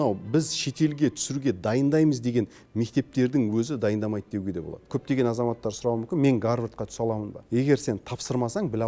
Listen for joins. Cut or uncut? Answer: cut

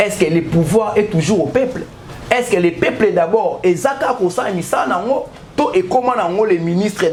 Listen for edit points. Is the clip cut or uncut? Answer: uncut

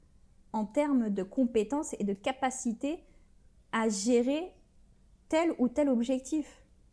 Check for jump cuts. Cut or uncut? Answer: uncut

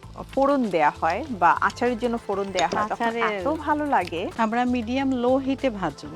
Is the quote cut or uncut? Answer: cut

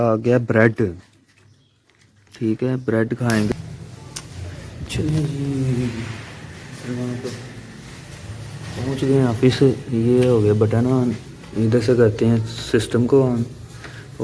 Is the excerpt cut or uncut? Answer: cut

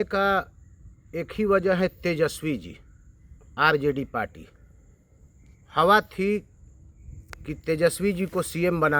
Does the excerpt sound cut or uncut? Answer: uncut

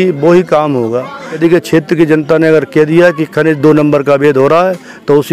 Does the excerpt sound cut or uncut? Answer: cut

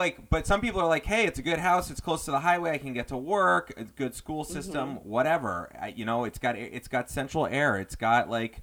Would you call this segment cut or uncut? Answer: uncut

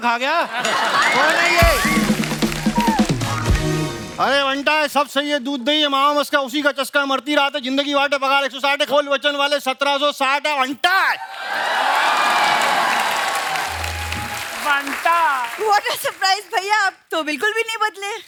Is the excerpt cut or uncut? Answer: uncut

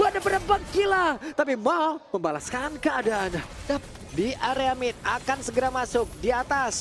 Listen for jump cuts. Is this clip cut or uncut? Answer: cut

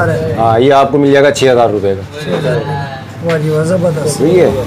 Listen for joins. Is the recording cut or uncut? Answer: uncut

